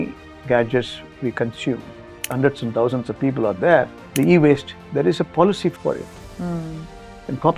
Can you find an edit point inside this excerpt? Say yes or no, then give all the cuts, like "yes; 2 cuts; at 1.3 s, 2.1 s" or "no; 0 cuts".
yes; 3 cuts; at 2.3 s, 4.0 s, 5.7 s